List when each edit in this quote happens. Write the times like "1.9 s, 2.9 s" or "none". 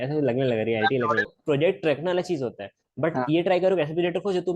1.3 s